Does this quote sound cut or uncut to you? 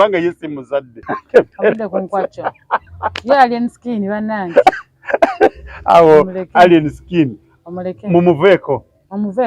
cut